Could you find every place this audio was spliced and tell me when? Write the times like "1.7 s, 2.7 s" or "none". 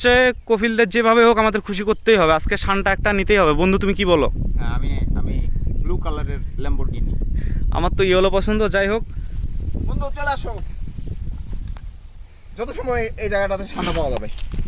9.2 s